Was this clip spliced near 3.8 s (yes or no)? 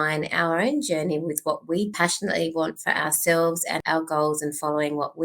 yes